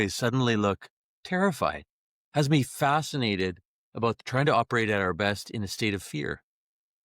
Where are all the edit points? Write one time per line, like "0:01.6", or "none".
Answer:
0:04.2